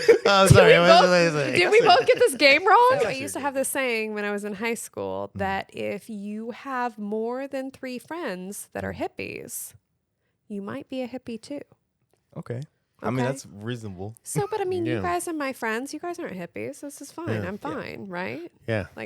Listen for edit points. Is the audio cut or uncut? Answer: cut